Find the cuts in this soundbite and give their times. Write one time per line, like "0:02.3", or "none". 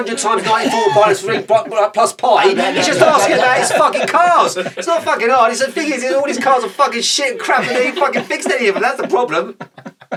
none